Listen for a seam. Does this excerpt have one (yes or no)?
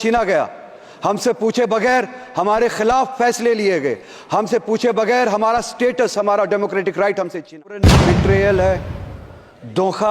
yes